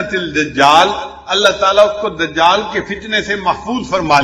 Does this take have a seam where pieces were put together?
no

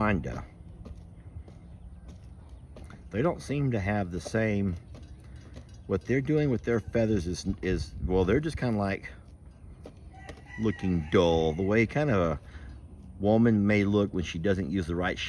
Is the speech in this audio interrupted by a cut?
no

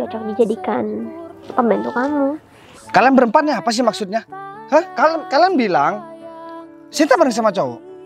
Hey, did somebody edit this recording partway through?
yes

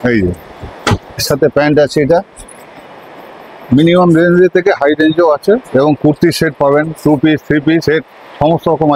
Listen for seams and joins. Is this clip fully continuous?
yes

